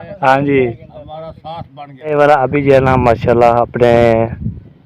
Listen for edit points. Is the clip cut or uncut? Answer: cut